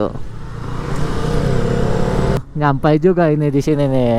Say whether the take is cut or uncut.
cut